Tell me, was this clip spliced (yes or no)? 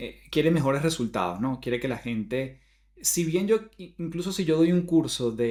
no